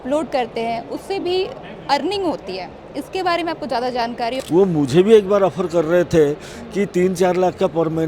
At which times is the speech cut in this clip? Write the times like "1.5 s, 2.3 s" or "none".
4.4 s

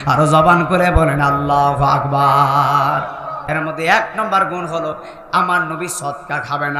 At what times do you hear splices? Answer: 3.4 s

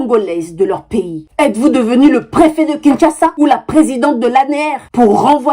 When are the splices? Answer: 1.2 s

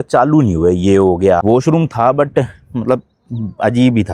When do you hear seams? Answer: 1.4 s

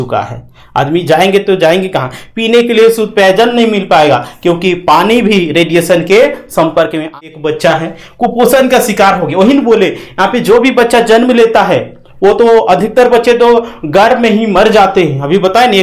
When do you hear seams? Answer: 7.1 s

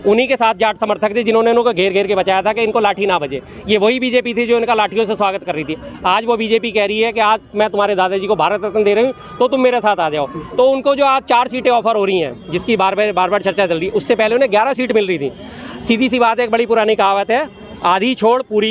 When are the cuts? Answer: none

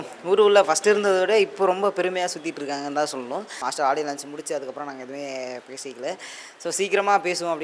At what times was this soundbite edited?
3.5 s

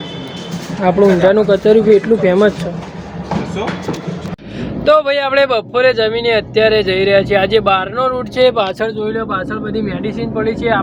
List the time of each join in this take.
none

